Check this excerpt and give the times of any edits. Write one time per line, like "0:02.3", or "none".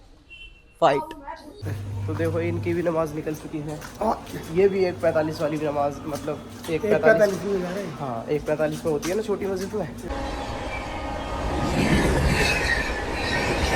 0:01.5
0:10.0